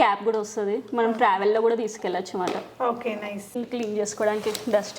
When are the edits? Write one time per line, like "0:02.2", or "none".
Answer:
0:03.6